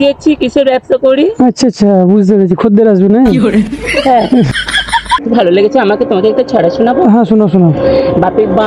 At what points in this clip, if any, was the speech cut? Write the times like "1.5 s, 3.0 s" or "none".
5.2 s